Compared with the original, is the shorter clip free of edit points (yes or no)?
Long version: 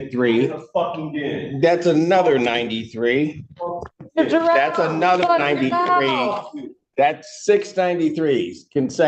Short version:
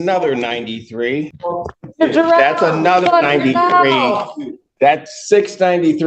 no